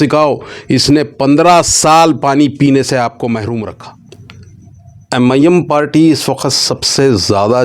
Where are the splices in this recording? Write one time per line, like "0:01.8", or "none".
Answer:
0:04.2